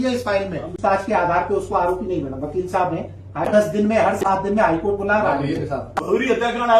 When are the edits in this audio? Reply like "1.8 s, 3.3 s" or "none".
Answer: 1.0 s, 3.5 s, 5.9 s